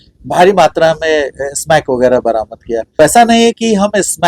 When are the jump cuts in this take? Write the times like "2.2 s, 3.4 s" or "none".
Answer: 2.9 s